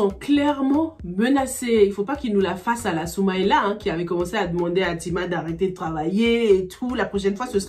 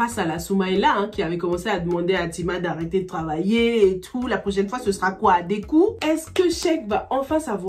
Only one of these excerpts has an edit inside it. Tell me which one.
second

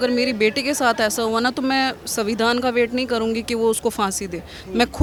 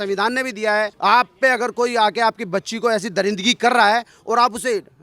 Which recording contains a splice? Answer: second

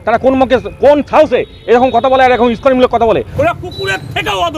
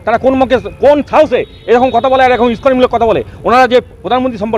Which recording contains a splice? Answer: first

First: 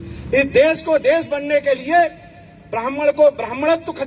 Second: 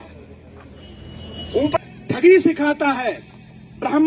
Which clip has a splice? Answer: second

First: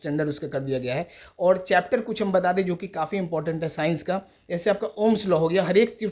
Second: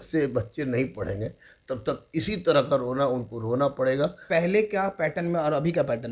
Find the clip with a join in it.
second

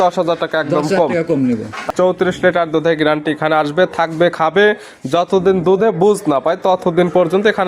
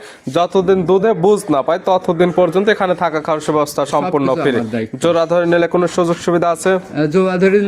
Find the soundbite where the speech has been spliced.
first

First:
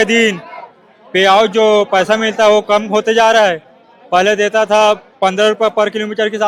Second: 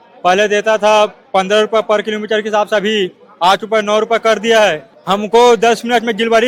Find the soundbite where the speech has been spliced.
second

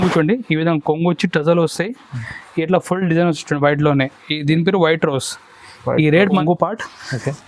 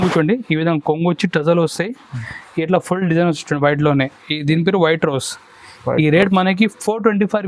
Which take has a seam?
first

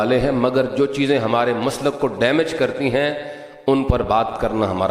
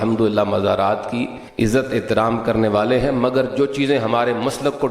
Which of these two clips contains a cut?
second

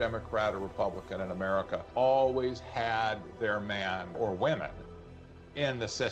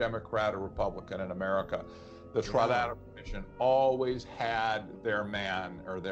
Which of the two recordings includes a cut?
first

